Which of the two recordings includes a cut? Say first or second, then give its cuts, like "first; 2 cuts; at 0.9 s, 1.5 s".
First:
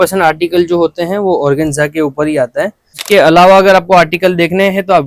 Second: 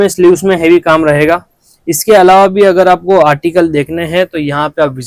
first; 1 cut; at 3.0 s